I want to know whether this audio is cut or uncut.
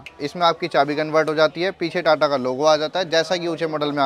uncut